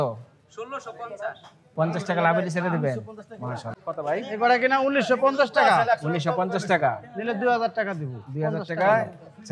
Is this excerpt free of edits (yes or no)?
no